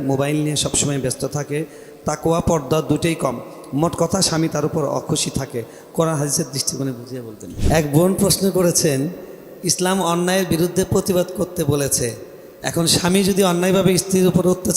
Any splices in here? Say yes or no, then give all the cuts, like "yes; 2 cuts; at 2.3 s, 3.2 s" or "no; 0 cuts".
yes; 1 cut; at 7.5 s